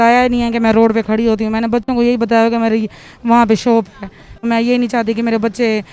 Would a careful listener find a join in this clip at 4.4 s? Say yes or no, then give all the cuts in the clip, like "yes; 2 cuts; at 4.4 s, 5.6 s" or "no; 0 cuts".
yes; 1 cut; at 4.4 s